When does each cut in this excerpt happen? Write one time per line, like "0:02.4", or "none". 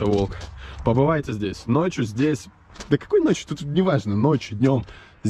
none